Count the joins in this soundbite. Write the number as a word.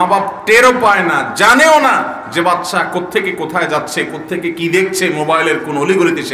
zero